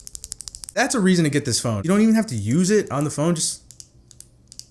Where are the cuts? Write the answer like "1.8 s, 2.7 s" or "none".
0.8 s, 1.8 s

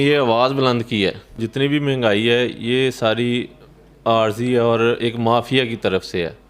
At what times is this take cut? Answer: 1.4 s

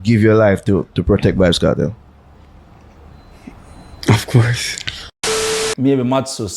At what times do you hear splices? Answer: 5.4 s

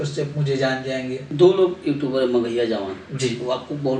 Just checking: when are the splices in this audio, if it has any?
1.2 s

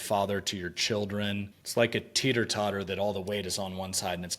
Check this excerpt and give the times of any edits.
1.6 s

